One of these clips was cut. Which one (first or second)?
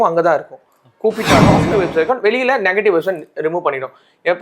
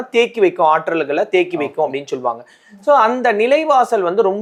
first